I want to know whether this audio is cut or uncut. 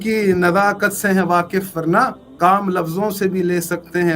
cut